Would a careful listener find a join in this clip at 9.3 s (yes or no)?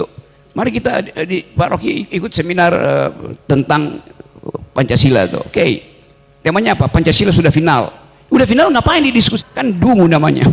yes